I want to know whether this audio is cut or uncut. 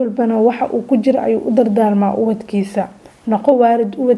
uncut